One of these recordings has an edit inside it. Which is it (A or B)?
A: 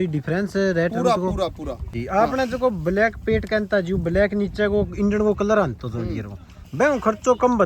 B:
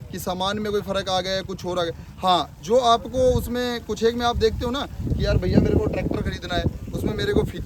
A